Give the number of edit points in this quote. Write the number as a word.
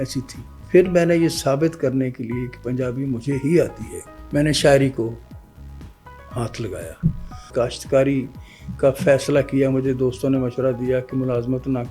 one